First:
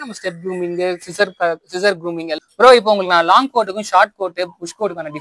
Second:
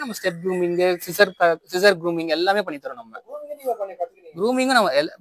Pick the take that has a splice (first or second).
first